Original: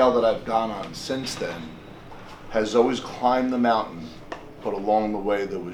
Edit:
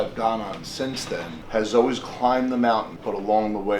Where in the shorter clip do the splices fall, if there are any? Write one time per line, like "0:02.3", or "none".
0:01.4
0:02.9